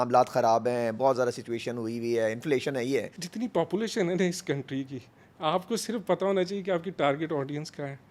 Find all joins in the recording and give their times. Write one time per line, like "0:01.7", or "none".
0:03.2